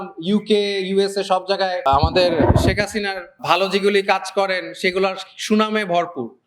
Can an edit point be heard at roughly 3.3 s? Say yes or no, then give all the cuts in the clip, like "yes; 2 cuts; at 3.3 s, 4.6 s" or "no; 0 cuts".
yes; 2 cuts; at 1.8 s, 3.3 s